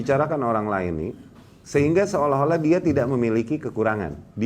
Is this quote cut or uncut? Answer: uncut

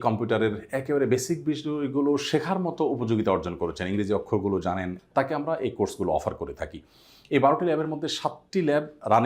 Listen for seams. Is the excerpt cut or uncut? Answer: cut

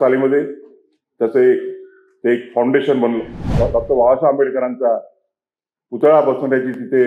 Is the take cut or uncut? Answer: cut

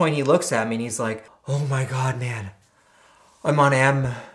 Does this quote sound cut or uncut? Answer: cut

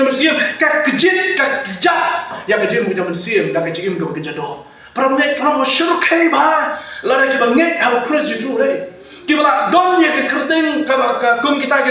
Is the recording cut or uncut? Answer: cut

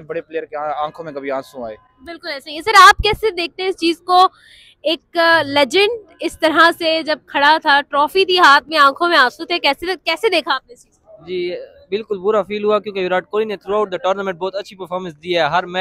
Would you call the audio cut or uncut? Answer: uncut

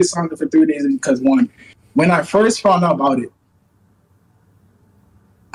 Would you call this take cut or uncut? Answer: uncut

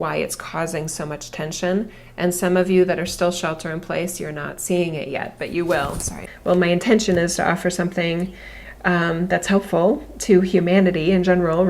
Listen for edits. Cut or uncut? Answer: cut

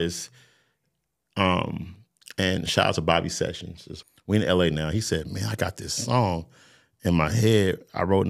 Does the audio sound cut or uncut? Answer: cut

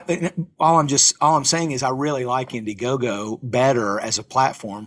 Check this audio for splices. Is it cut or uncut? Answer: uncut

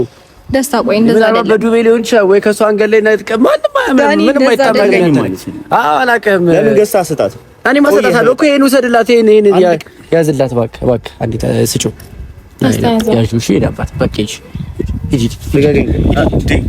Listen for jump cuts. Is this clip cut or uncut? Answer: uncut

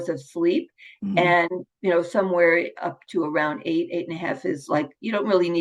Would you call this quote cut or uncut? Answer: uncut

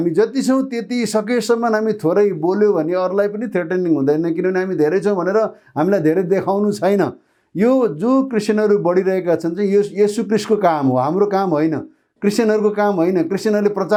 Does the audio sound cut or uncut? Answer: uncut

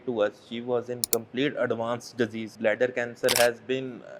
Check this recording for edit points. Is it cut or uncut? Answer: cut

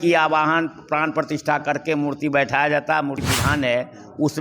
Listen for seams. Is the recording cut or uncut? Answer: cut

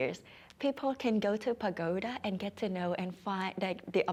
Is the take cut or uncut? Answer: uncut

